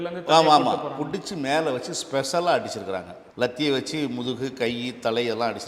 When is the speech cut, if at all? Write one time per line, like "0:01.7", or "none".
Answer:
0:03.2